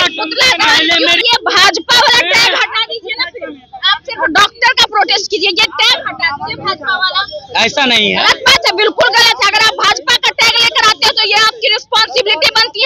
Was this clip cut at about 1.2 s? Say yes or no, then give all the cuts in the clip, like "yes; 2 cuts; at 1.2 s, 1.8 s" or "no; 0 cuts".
yes; 1 cut; at 1.2 s